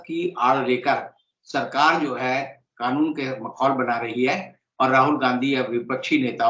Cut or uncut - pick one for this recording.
uncut